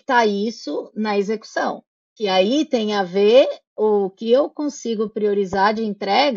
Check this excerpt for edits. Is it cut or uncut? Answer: uncut